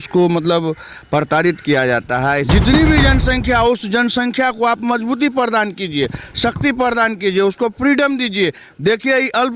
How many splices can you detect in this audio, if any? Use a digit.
1